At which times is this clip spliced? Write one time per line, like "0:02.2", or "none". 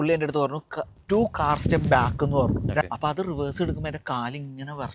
0:02.8